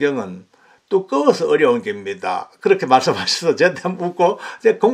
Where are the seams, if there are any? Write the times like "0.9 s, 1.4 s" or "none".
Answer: none